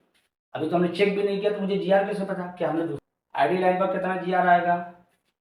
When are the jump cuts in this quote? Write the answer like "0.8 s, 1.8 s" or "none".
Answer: 3.0 s